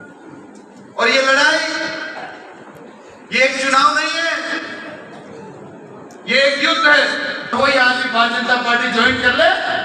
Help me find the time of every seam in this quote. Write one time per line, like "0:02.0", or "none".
0:07.5